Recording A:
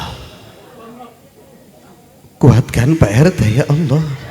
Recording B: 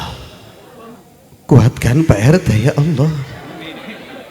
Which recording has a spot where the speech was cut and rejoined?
B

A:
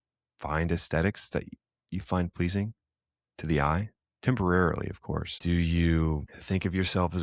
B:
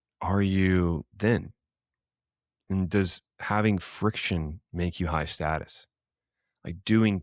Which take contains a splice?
A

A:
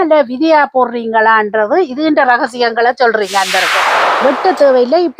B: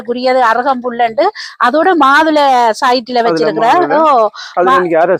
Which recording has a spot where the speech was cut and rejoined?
A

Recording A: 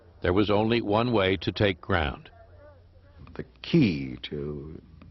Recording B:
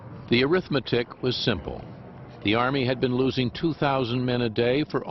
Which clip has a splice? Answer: A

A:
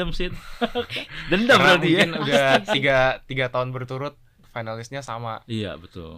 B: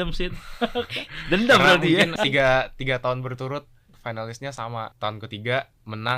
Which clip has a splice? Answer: B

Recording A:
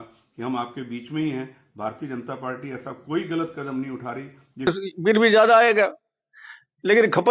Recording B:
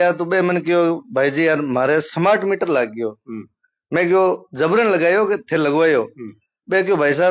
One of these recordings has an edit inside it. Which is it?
A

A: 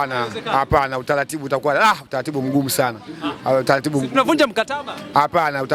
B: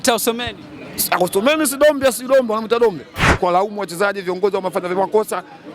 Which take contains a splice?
B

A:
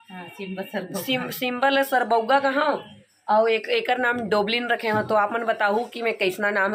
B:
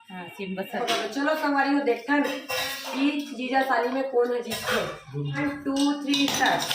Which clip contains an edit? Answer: B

